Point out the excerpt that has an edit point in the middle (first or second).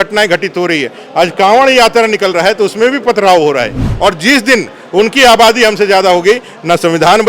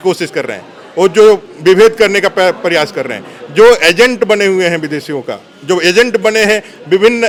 first